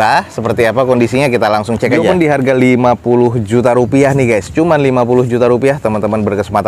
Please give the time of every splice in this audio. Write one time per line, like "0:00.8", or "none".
0:02.1